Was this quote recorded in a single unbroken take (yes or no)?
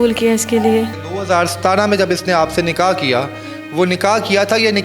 no